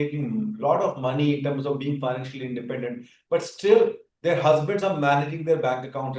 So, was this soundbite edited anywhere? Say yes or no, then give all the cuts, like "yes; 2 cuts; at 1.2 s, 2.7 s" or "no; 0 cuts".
no; 0 cuts